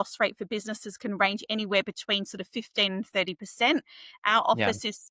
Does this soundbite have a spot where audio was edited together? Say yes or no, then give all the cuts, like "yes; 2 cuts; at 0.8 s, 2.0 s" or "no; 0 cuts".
no; 0 cuts